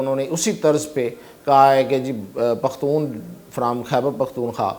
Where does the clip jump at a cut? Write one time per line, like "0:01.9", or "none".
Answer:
none